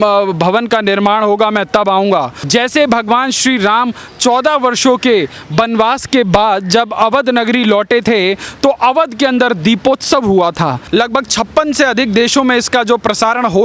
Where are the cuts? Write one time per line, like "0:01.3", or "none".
0:02.4
0:10.8